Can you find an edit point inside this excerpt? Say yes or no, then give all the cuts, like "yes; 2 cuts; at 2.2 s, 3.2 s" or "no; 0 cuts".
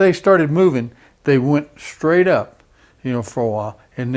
no; 0 cuts